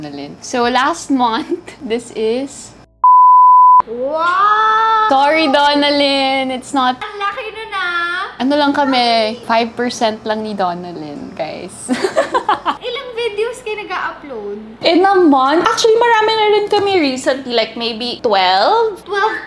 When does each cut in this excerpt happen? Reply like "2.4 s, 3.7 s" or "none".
none